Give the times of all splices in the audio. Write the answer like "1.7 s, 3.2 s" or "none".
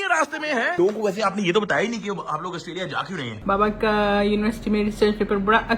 0.7 s, 3.3 s